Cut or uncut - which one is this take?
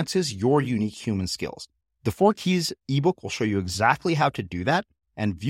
uncut